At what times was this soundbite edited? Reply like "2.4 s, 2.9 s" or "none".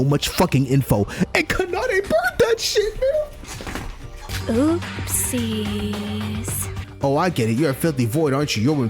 6.7 s